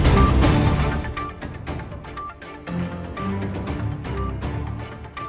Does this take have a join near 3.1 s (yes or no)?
no